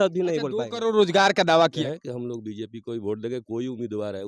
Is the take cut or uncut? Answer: cut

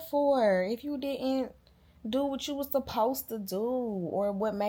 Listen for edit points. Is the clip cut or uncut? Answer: uncut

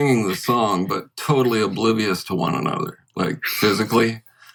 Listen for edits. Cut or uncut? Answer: uncut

